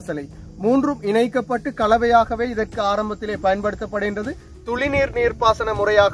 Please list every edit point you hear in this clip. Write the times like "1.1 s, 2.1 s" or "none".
4.5 s